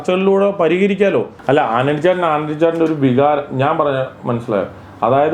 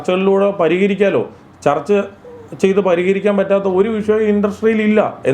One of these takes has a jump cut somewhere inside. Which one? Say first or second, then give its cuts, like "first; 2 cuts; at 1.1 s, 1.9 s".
first; 1 cut; at 1.3 s